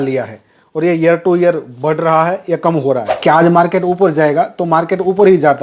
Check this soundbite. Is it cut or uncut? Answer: cut